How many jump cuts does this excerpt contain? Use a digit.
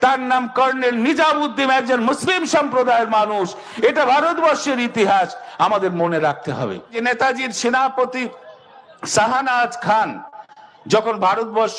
1